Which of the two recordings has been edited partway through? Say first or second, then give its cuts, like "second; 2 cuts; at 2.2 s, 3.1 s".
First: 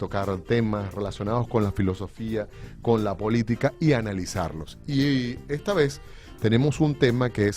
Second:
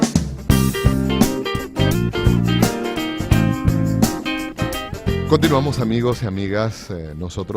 first; 1 cut; at 3.3 s